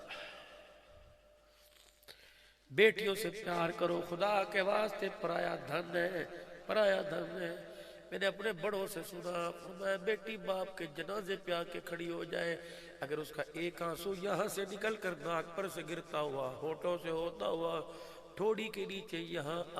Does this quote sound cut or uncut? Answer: uncut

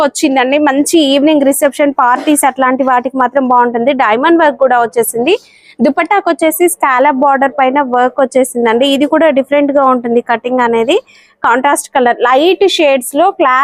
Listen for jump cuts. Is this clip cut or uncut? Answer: uncut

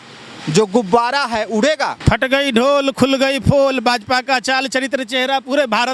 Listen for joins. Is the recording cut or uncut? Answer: cut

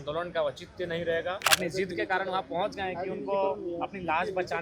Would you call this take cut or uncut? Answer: cut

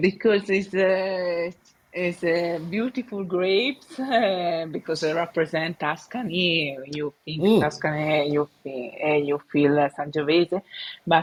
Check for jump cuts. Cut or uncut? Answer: uncut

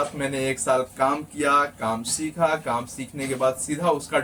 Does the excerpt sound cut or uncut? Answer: uncut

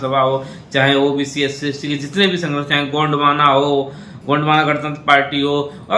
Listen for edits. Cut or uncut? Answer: uncut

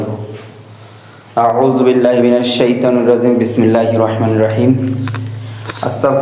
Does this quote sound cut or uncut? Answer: uncut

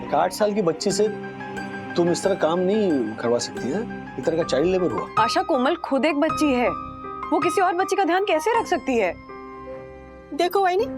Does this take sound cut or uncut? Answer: cut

